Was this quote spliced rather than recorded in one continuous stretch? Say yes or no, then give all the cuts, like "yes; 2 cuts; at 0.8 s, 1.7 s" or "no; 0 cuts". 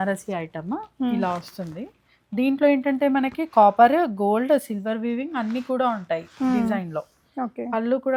no; 0 cuts